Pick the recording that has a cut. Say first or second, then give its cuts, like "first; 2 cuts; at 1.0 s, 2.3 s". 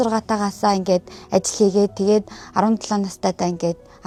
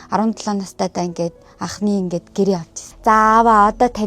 second; 1 cut; at 2.9 s